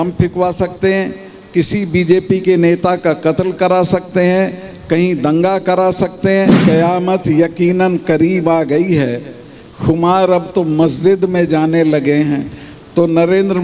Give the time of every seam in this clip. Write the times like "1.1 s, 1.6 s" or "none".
6.6 s

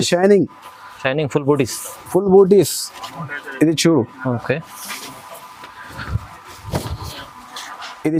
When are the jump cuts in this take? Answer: none

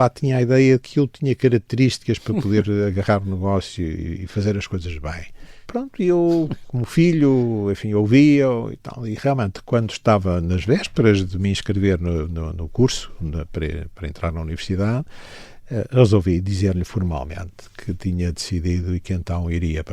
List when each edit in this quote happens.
5.6 s

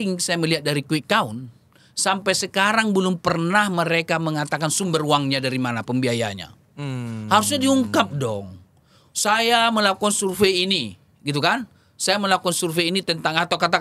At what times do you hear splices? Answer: none

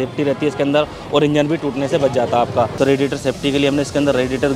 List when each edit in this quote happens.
2.8 s

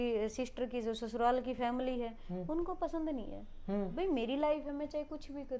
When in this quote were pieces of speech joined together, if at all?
none

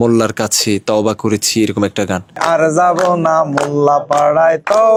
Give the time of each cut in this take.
none

